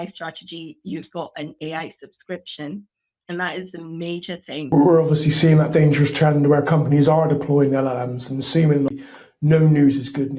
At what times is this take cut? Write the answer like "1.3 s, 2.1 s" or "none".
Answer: 4.7 s, 8.9 s